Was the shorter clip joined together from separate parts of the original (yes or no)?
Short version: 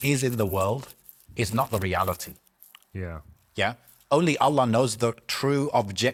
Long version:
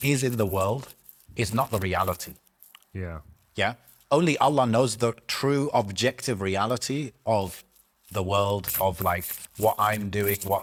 no